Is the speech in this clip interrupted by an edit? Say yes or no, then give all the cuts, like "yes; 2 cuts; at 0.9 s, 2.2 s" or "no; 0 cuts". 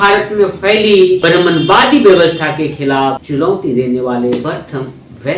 yes; 3 cuts; at 1.2 s, 3.2 s, 4.4 s